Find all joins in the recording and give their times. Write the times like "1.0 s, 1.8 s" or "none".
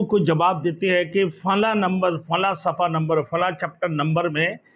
none